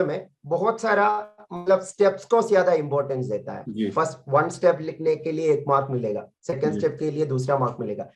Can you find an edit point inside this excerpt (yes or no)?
no